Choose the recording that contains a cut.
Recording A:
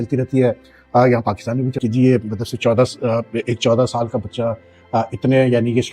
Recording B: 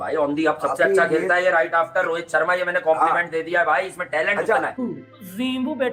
B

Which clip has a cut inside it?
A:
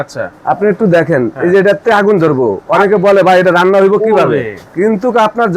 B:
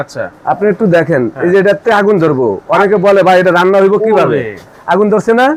A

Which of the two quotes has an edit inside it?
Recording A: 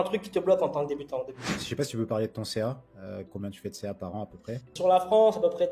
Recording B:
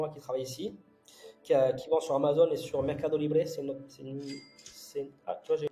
A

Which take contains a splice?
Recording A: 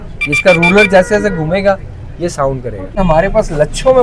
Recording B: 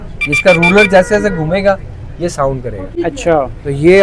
A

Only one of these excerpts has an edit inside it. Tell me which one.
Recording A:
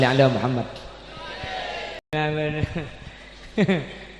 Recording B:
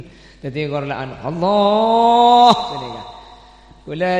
A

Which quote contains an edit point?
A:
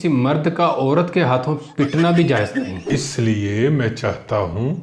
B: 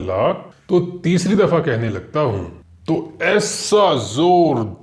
A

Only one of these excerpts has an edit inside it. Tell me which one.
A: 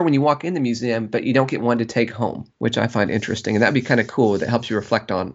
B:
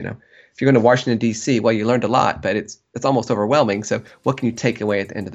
A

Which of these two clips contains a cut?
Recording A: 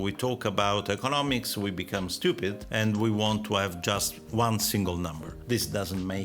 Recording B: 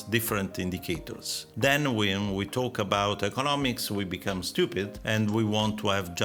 A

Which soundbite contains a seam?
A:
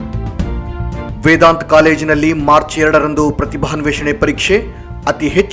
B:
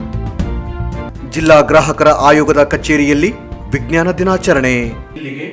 A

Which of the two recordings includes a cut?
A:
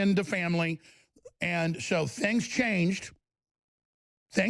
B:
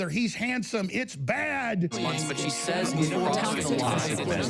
B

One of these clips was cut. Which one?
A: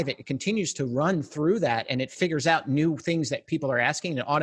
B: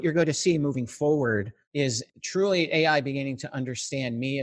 B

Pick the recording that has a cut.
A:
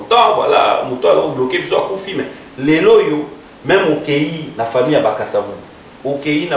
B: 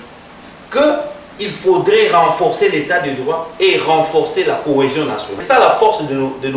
B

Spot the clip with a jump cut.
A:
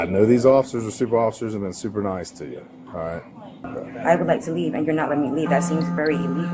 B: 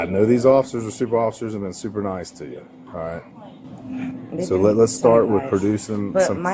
A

